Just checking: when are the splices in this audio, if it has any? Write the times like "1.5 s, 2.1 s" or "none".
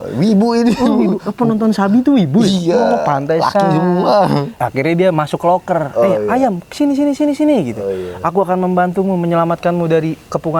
4.5 s